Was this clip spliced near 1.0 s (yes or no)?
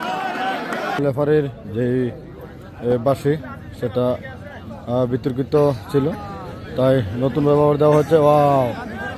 yes